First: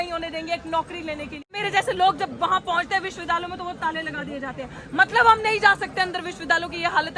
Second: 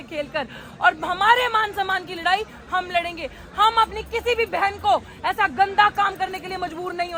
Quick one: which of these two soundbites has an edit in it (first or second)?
first